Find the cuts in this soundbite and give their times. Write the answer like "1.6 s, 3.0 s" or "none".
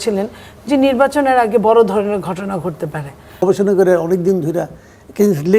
3.4 s